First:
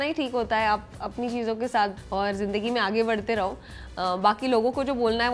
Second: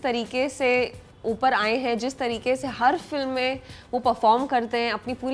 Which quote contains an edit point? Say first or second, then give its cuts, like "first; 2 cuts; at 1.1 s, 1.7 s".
first; 1 cut; at 2.0 s